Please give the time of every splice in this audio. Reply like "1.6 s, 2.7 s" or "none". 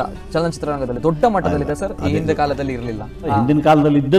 3.3 s